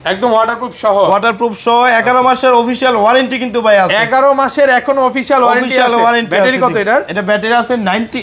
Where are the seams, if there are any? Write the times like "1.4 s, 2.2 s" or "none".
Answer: none